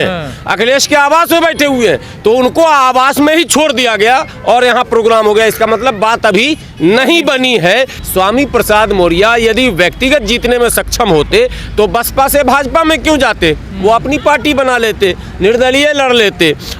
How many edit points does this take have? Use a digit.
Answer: 1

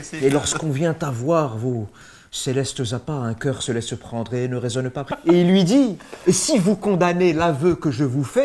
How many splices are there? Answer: 1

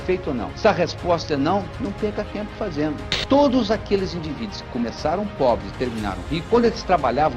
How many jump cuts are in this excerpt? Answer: 1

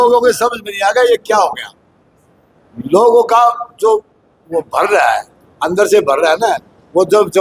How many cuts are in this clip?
0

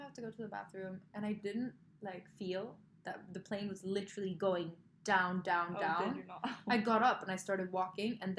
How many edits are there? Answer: 0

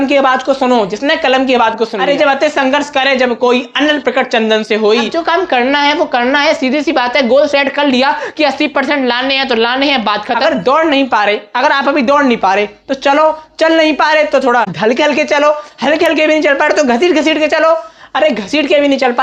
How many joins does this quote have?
4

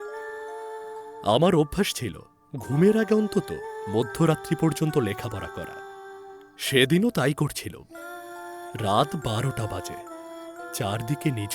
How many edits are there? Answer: 1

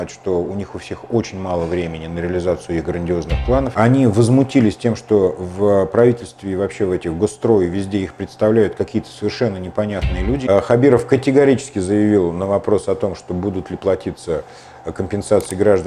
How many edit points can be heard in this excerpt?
2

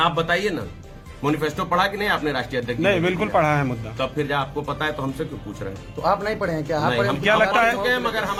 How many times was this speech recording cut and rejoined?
0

